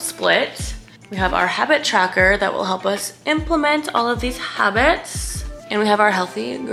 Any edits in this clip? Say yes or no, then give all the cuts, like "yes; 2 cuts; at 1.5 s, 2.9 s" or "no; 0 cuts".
no; 0 cuts